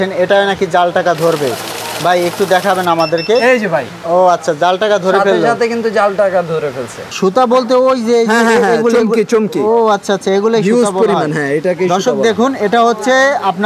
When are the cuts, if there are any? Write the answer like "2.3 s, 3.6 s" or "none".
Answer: 7.0 s